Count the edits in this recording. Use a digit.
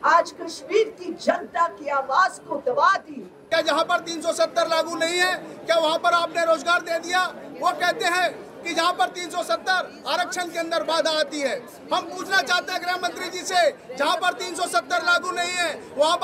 1